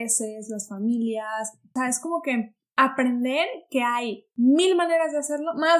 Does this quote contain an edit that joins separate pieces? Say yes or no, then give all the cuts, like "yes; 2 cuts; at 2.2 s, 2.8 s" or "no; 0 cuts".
yes; 2 cuts; at 1.7 s, 4.2 s